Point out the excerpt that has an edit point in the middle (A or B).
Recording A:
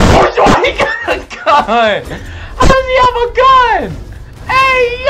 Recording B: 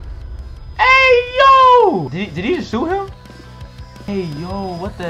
B